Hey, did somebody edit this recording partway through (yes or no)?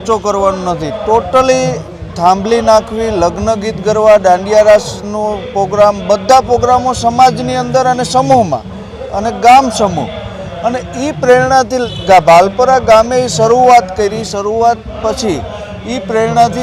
no